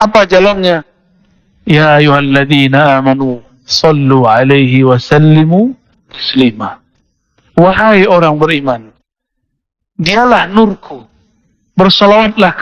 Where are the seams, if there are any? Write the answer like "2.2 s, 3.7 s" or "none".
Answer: none

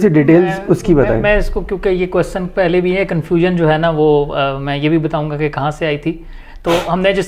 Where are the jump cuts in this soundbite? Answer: none

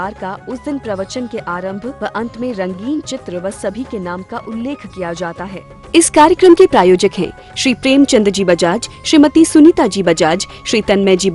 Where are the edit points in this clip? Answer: 5.6 s

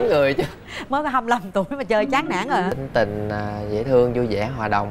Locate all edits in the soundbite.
2.7 s

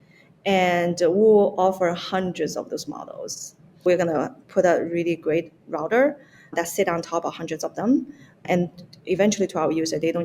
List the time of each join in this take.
3.9 s, 6.5 s, 8.4 s

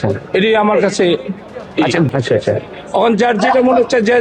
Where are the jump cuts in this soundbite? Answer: 2.1 s

